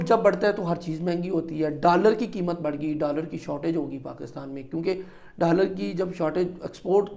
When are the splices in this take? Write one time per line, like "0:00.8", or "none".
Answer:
none